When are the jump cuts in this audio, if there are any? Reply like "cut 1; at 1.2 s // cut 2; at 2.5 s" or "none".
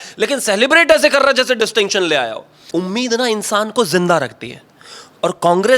cut 1; at 2.6 s